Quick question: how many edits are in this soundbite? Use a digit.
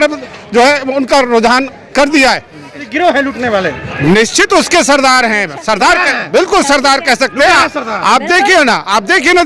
1